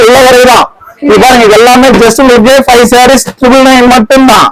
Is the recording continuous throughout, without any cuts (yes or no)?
yes